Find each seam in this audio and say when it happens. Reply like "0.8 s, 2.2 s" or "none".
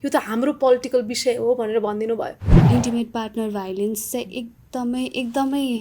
2.5 s